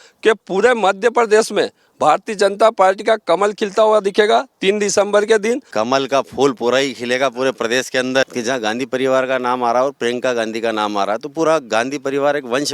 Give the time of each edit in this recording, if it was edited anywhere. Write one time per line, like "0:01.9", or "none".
0:05.7
0:08.3